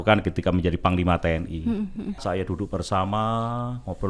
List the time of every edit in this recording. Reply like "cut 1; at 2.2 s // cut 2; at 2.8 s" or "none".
cut 1; at 2.2 s